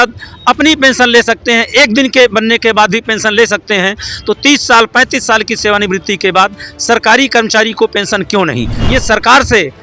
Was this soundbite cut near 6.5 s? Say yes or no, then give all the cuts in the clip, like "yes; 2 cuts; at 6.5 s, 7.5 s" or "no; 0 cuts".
no; 1 cut; at 8.8 s